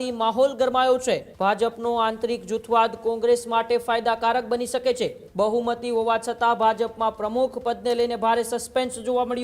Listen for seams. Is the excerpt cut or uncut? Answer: cut